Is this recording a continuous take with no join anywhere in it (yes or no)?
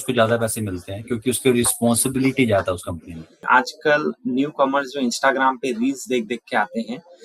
no